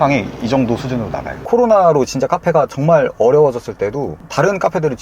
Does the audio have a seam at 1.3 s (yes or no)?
yes